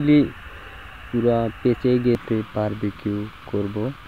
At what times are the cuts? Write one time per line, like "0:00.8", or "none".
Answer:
0:02.2